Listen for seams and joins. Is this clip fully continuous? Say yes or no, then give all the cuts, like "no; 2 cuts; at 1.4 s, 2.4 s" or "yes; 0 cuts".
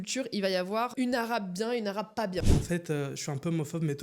no; 1 cut; at 2.4 s